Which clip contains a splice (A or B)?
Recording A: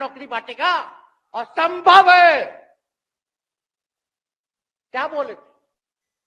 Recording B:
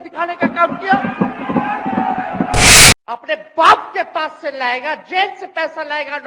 B